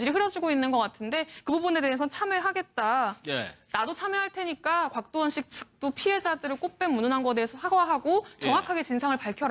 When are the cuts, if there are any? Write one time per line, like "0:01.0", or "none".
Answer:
none